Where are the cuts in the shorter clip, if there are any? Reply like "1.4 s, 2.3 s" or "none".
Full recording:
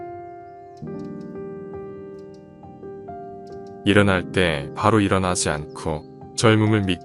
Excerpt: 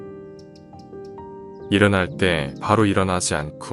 1.7 s